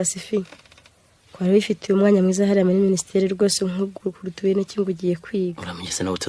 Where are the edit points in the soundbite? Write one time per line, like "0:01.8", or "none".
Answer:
none

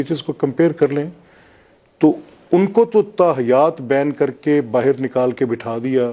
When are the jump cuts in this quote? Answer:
none

